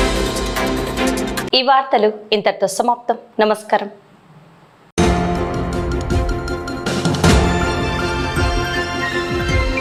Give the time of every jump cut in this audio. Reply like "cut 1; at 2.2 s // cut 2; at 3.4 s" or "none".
none